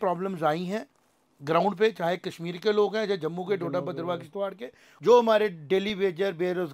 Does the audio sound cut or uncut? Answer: cut